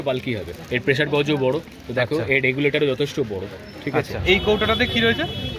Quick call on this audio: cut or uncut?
cut